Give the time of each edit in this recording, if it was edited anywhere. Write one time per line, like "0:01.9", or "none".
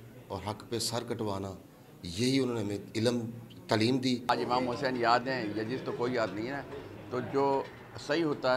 0:04.3